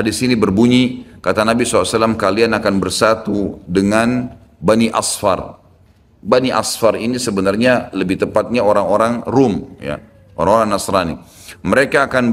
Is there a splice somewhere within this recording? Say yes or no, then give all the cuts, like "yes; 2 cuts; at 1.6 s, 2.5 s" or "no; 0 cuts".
no; 0 cuts